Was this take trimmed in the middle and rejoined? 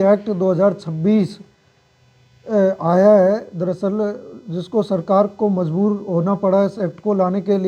no; 0 cuts

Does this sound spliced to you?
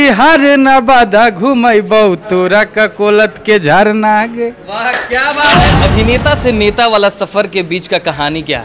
yes; 1 cut; at 5.7 s

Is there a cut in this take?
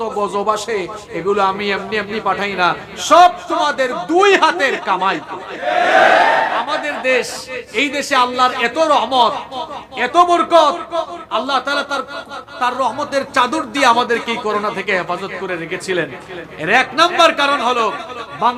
yes; 1 cut; at 6.7 s

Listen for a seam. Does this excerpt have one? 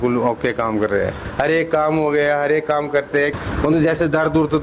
yes; 1 cut; at 3.4 s

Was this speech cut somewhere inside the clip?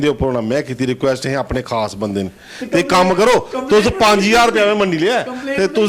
no; 0 cuts

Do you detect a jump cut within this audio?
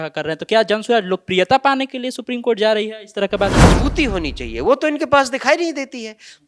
yes; 1 cut; at 3.6 s

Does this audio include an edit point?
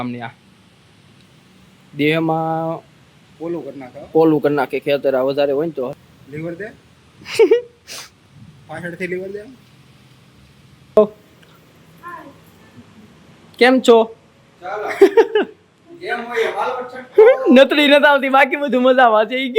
yes; 2 cuts; at 5.9 s, 11.0 s

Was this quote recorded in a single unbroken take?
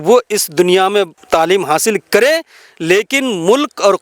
no; 1 cut; at 1.2 s

